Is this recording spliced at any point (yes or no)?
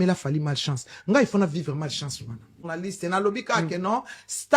yes